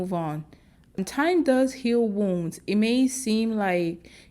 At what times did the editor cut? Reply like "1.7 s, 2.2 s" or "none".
1.0 s